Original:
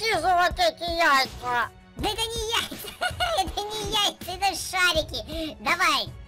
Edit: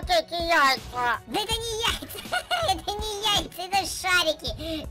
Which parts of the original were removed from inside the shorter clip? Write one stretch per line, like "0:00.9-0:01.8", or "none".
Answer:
0:01.7-0:01.9